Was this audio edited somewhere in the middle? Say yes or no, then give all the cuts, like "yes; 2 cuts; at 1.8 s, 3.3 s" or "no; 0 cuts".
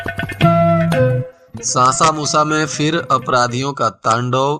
yes; 1 cut; at 1.4 s